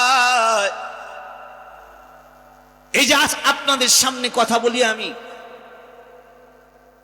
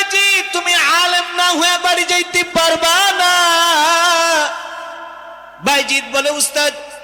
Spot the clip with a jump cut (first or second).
first